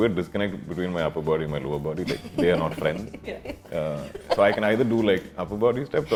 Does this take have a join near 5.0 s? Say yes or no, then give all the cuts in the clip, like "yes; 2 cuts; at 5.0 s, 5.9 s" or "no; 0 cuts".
no; 0 cuts